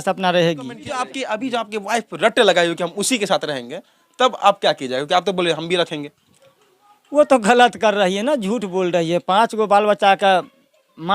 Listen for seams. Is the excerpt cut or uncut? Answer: cut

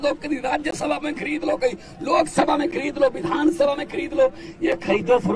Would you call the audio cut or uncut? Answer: uncut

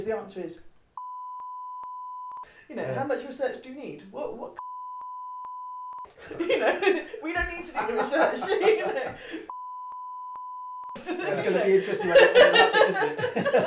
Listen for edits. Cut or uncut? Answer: uncut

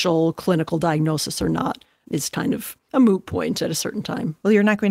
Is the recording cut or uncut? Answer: cut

